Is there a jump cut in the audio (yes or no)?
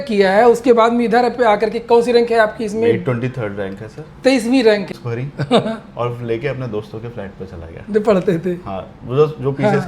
yes